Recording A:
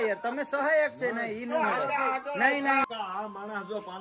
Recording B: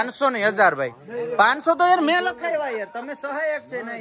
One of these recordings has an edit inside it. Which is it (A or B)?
A